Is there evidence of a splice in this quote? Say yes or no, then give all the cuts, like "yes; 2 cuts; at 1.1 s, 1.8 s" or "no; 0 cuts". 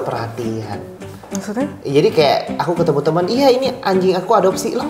no; 0 cuts